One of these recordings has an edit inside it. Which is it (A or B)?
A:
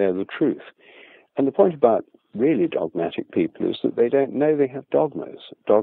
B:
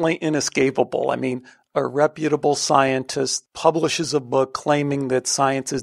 B